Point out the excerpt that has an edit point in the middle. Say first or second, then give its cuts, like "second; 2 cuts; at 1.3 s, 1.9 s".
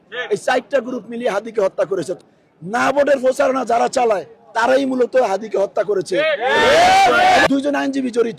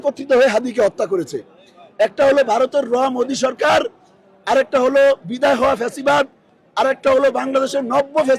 first; 2 cuts; at 2.2 s, 7.5 s